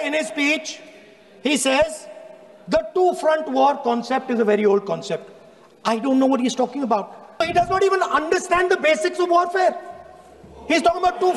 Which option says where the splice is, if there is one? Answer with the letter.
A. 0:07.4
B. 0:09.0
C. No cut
A